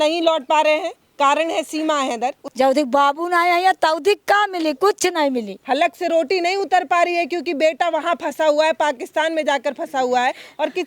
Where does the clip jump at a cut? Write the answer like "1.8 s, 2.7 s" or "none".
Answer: 2.4 s, 5.5 s